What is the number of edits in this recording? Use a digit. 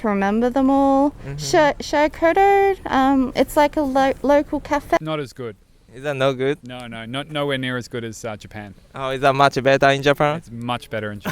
1